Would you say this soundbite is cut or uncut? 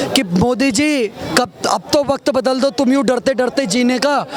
uncut